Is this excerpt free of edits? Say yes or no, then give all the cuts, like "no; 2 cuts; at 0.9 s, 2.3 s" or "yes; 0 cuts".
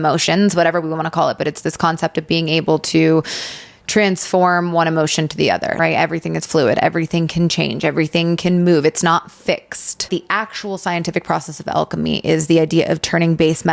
no; 2 cuts; at 5.8 s, 10.1 s